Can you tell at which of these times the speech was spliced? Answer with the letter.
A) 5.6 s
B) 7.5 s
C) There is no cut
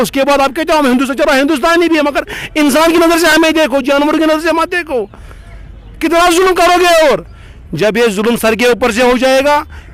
C